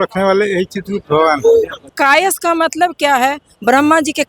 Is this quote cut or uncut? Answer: cut